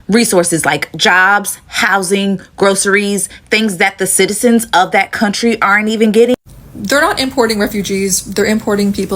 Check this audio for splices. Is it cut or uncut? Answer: cut